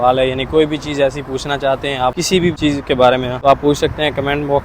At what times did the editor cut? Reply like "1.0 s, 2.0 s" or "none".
2.5 s, 3.3 s